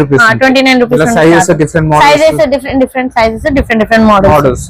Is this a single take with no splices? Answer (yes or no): yes